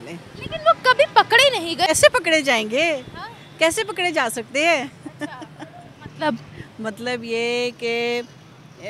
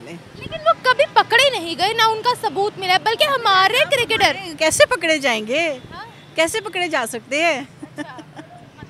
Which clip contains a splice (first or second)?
first